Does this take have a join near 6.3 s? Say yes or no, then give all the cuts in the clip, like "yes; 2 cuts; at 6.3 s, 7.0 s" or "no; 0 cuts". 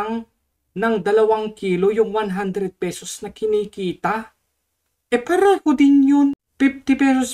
yes; 1 cut; at 6.3 s